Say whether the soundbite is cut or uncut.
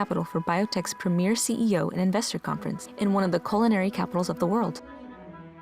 cut